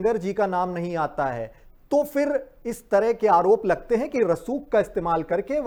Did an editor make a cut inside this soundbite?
no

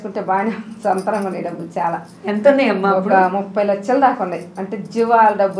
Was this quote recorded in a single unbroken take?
yes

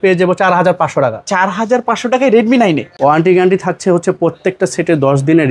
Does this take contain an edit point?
yes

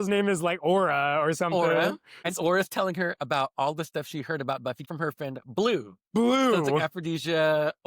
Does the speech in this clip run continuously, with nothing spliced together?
no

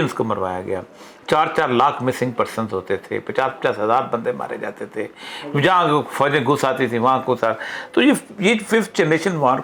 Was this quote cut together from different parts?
no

